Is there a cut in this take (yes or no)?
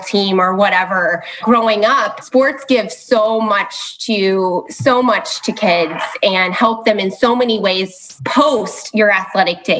yes